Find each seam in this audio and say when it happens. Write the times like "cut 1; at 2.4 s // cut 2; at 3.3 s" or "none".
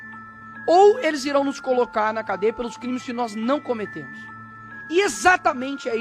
none